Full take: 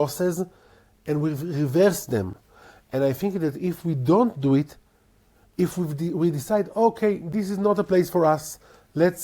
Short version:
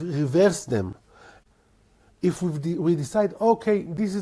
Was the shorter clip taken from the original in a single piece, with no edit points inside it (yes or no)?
no